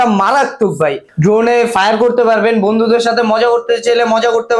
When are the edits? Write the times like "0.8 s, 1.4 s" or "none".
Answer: 1.1 s